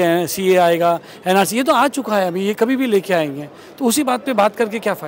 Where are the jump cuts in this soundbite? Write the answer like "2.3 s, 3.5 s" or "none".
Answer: none